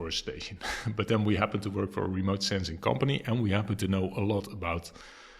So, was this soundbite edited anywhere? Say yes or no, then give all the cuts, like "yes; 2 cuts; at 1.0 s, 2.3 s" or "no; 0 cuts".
no; 0 cuts